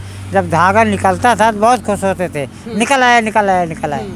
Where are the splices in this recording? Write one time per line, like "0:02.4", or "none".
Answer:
none